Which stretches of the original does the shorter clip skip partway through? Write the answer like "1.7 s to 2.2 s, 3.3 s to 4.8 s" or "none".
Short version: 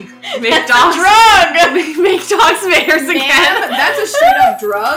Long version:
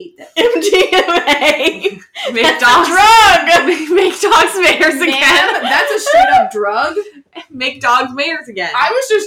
none